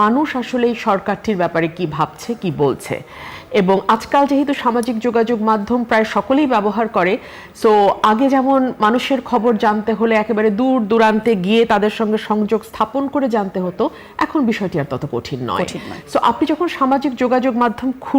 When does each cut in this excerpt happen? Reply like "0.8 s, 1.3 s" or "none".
none